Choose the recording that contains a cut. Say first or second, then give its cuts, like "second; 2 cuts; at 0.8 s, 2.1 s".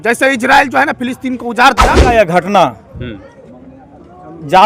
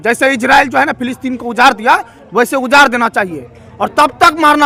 first; 1 cut; at 2.0 s